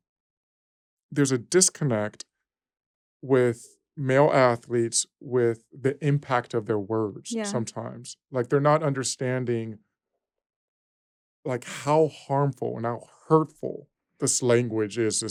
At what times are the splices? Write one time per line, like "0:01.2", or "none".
none